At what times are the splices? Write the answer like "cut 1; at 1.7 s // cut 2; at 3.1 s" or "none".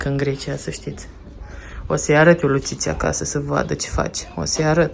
none